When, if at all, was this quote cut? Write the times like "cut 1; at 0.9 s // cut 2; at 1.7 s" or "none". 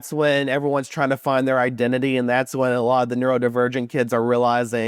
none